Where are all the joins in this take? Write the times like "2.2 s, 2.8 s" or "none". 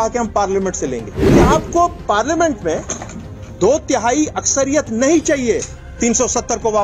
1.2 s, 5.8 s

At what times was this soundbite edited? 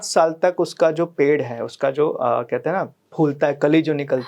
3.0 s

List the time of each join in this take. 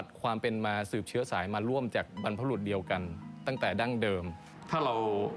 4.4 s

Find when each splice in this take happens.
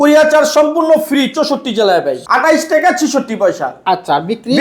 2.2 s

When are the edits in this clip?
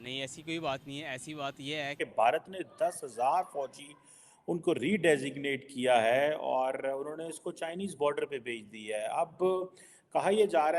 1.9 s

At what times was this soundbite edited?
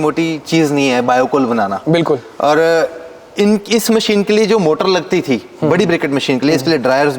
none

